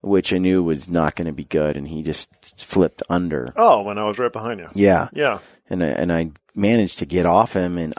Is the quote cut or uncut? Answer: uncut